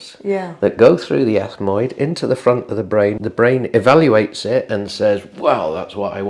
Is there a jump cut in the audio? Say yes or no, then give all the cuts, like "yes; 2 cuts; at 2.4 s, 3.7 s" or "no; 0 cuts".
yes; 1 cut; at 3.2 s